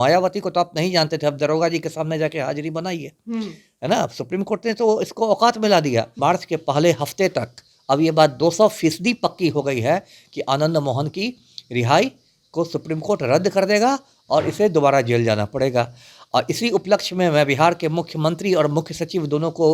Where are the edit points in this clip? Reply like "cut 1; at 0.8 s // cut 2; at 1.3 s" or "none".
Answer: cut 1; at 6.1 s